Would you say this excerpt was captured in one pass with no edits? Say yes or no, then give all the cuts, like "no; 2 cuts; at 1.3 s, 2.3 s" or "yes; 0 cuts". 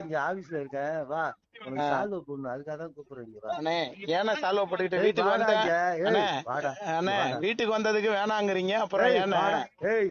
yes; 0 cuts